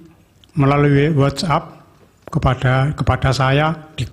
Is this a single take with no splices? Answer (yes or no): no